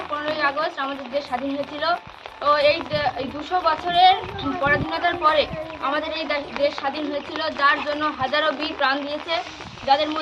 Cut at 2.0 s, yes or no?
no